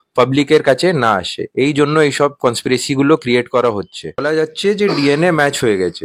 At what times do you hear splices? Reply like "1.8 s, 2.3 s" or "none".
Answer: 4.2 s

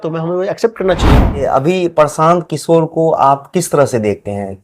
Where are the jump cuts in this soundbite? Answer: 1.4 s

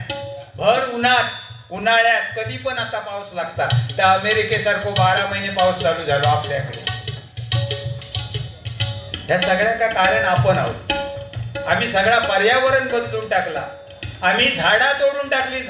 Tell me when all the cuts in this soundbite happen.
none

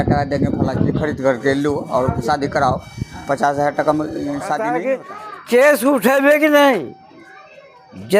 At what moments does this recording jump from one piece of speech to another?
4.8 s

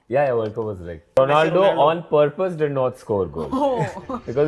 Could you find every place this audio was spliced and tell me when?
1.2 s

